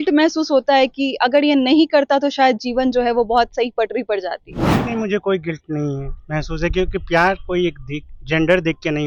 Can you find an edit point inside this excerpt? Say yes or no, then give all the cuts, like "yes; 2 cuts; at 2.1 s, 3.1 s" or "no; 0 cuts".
no; 0 cuts